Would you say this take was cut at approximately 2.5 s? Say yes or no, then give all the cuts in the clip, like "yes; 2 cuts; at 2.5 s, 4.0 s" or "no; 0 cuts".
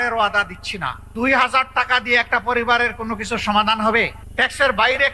no; 2 cuts; at 1.0 s, 4.2 s